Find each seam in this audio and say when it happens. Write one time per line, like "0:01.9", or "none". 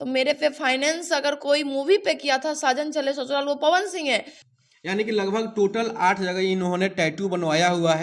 0:04.4